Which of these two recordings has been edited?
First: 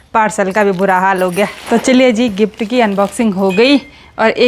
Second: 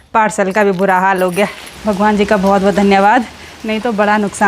second; 1 cut; at 1.6 s

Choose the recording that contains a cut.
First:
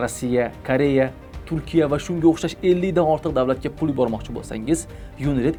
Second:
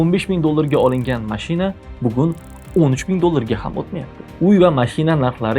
second; 1 cut; at 4.2 s

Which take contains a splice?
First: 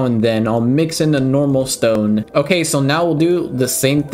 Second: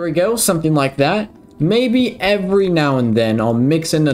first; 1 cut; at 2.3 s

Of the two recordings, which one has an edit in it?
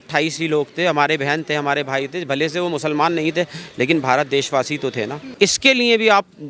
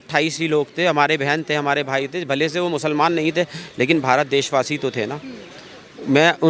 first; 1 cut; at 5.3 s

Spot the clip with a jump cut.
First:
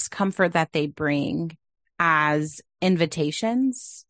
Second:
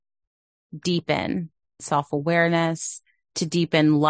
second; 1 cut; at 1.8 s

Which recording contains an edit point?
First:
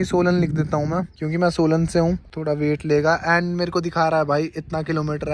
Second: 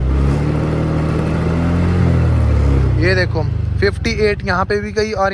first; 2 cuts; at 1.2 s, 2.3 s

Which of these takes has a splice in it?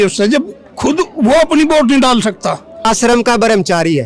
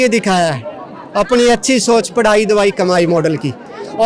first; 1 cut; at 2.9 s

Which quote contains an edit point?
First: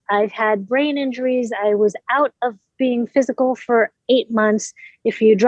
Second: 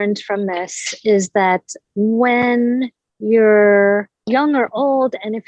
second; 1 cut; at 1.8 s

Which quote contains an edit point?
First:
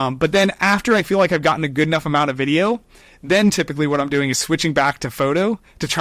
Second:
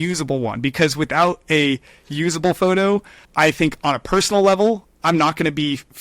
second; 1 cut; at 3.2 s

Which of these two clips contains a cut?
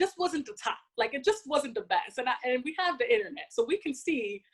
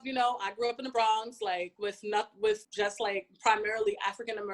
second; 2 cuts; at 1.7 s, 2.7 s

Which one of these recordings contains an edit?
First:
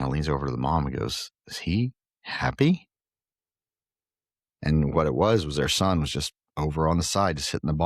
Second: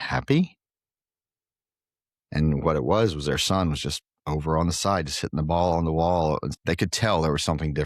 second; 1 cut; at 6.5 s

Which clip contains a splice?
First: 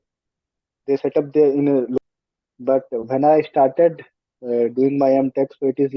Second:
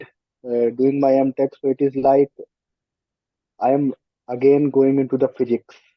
first; 1 cut; at 2.0 s

